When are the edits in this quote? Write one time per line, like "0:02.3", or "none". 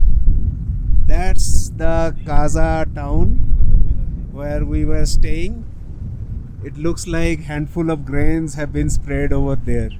none